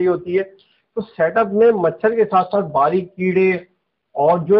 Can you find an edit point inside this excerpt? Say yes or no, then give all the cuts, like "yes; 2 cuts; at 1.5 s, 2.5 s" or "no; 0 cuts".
no; 0 cuts